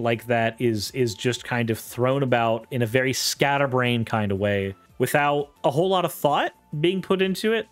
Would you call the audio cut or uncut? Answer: cut